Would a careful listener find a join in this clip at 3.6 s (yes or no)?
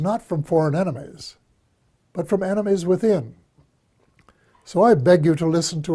no